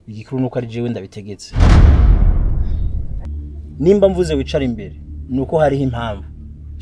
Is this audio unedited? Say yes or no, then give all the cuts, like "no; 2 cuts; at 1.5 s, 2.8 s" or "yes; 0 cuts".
no; 1 cut; at 3.2 s